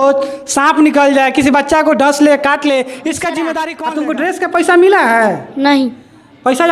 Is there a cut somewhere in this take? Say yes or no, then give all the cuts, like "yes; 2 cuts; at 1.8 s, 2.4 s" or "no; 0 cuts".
yes; 1 cut; at 3.8 s